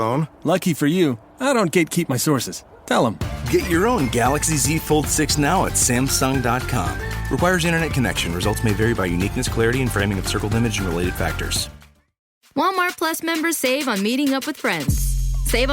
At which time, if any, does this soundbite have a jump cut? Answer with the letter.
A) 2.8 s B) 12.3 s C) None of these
B